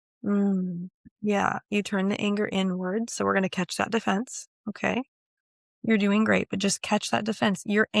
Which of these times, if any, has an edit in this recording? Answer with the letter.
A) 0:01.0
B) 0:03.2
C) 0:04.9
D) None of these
A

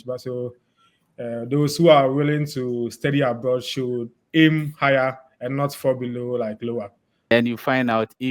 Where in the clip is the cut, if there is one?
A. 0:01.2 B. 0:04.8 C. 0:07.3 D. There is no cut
C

